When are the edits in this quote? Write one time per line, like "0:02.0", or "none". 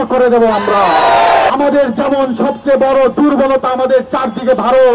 0:01.5